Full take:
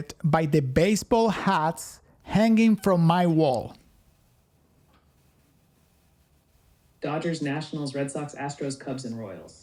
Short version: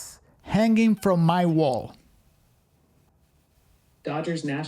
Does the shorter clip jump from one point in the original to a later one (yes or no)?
yes